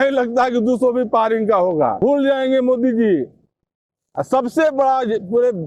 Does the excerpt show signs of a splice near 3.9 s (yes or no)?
no